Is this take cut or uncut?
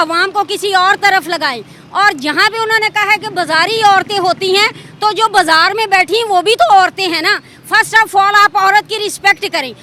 uncut